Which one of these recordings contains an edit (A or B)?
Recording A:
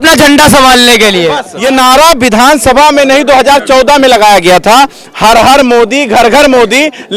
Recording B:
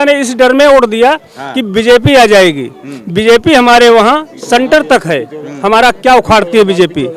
A